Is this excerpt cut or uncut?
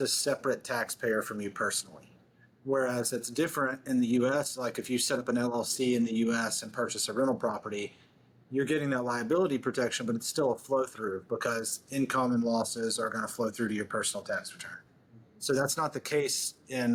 uncut